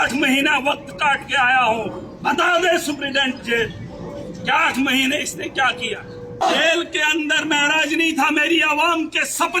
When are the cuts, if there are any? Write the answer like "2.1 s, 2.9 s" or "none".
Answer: 6.4 s